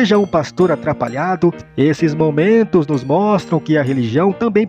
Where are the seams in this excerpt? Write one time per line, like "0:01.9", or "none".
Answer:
0:01.6